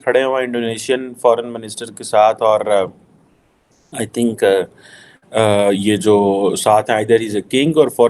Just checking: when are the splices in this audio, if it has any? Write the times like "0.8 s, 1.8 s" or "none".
none